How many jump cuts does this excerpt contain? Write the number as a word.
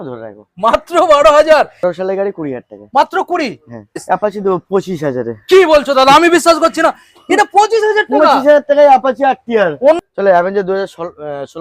three